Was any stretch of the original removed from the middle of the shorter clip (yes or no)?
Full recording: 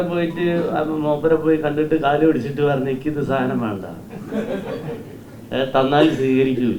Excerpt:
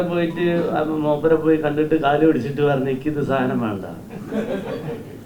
no